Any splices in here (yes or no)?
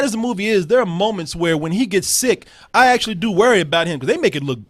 no